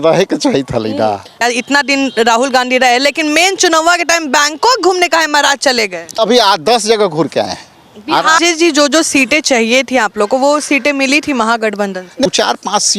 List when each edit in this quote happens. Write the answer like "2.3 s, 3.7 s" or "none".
1.4 s, 6.2 s, 8.4 s, 12.3 s